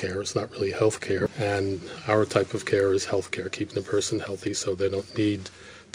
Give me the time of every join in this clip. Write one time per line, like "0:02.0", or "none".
0:01.3